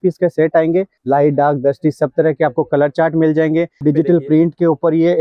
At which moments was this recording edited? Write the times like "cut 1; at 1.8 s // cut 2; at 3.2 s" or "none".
cut 1; at 1.0 s // cut 2; at 3.8 s